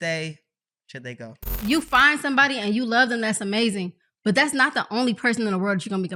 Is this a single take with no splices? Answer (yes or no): no